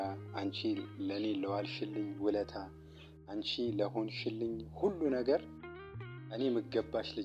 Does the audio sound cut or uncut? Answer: uncut